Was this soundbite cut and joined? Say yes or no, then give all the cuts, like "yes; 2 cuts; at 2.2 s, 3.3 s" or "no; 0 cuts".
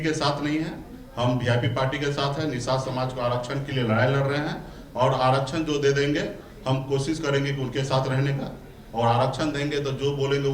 no; 0 cuts